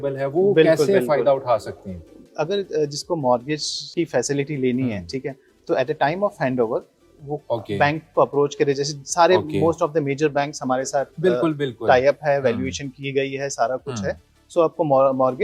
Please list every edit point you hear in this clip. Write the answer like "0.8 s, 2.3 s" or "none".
none